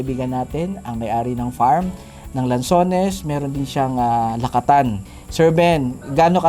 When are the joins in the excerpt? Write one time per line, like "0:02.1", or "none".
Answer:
0:05.0